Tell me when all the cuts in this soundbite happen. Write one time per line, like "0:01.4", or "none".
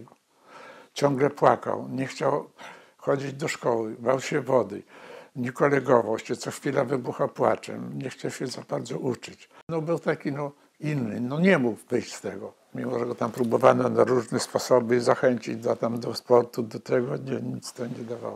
0:09.7